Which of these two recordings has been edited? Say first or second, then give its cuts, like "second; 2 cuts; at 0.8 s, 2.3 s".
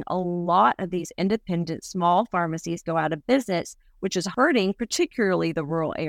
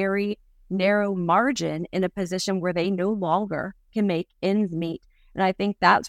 first; 1 cut; at 4.3 s